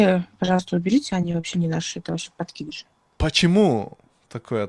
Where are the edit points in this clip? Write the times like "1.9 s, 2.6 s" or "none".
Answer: 3.1 s